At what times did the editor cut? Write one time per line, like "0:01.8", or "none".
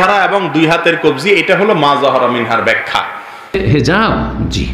0:03.4